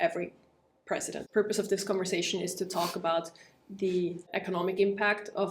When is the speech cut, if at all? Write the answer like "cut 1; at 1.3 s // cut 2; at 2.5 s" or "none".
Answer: cut 1; at 1.2 s // cut 2; at 4.3 s